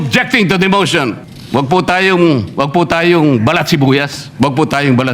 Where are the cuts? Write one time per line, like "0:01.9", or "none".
0:01.3
0:04.2